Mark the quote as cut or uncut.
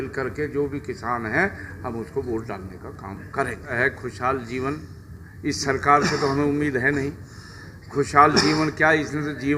cut